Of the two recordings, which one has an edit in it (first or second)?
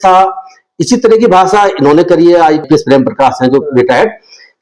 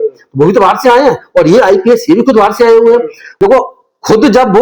second